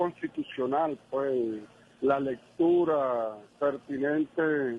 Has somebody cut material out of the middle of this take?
no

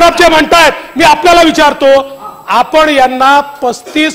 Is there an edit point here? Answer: no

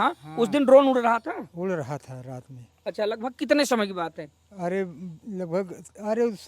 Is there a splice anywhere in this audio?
no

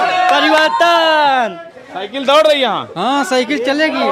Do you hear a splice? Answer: no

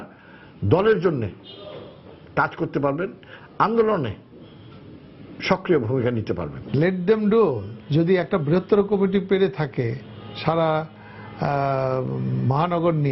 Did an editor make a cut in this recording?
no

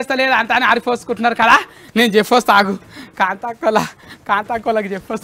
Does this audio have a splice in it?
no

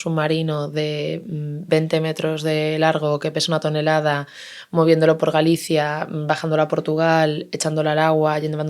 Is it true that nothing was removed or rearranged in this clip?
yes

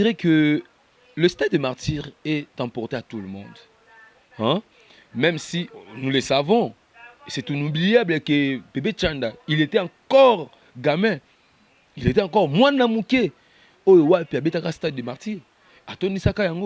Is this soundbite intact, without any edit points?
yes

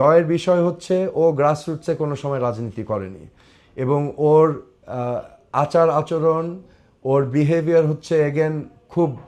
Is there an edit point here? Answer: no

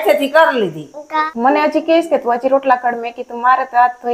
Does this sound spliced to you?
yes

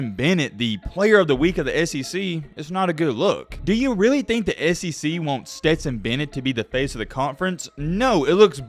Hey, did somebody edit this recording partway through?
yes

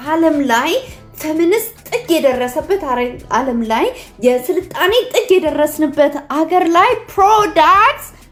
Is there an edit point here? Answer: no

